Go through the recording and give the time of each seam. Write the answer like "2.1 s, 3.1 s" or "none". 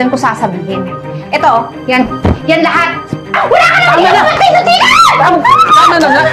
3.3 s